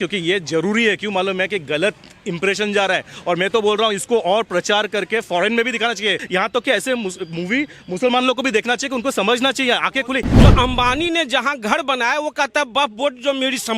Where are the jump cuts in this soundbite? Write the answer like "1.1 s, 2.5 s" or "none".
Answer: 6.2 s, 10.3 s